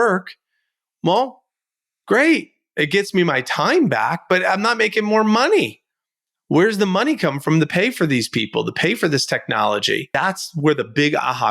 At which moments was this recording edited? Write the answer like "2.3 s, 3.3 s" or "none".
10.1 s